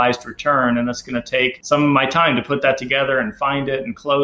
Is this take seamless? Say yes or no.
no